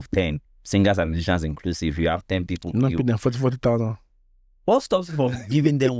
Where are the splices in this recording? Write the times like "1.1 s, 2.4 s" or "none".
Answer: none